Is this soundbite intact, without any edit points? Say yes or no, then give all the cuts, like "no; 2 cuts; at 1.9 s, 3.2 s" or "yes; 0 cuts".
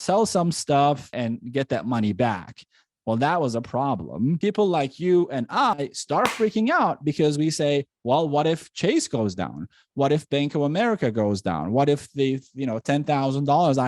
no; 2 cuts; at 1.1 s, 4.4 s